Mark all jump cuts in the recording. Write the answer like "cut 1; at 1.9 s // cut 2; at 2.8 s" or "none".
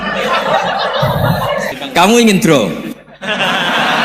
cut 1; at 1.7 s